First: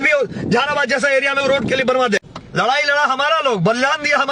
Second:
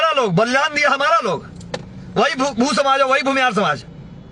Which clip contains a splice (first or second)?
first